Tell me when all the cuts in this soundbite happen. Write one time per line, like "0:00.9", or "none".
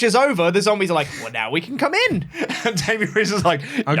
none